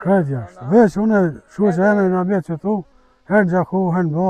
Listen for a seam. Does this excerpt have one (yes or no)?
no